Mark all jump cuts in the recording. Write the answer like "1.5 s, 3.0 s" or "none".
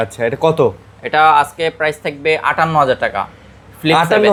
none